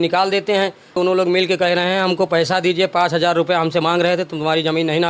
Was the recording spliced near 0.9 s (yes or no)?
yes